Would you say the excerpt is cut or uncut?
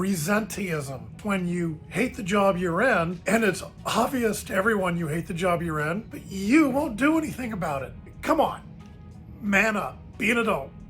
cut